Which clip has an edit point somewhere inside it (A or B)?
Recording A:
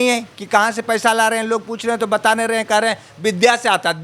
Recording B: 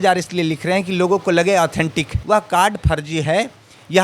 B